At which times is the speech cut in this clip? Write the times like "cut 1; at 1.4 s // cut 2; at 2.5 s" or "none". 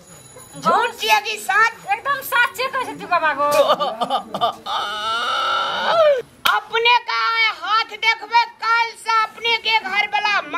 cut 1; at 6.3 s

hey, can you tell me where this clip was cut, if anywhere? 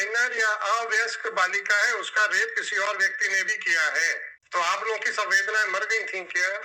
cut 1; at 4.4 s

